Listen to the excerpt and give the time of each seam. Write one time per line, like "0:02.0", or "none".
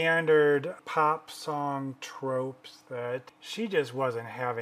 0:00.8
0:03.4

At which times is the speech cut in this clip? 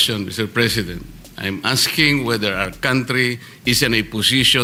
none

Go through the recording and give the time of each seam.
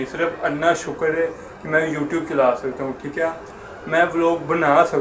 none

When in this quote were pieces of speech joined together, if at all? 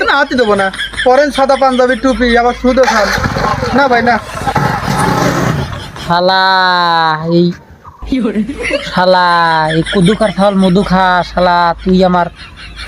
none

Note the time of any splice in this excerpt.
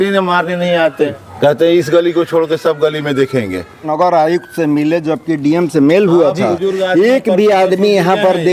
0:01.1
0:03.9

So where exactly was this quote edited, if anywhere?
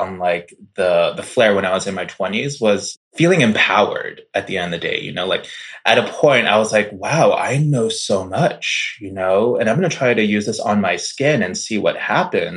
0:03.0

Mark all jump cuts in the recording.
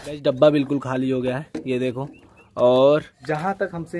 none

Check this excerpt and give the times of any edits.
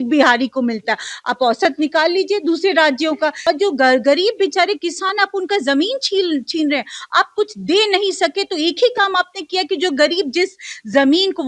0:03.4

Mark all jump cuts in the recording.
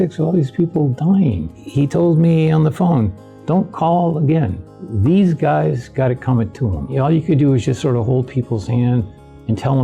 0:01.5
0:06.9

